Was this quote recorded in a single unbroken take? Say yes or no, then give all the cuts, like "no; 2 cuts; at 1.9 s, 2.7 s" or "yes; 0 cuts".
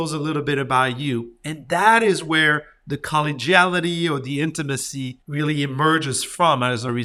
no; 1 cut; at 5.2 s